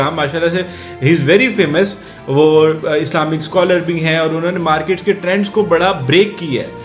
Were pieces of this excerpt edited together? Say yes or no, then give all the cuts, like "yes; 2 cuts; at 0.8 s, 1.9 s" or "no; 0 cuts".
no; 0 cuts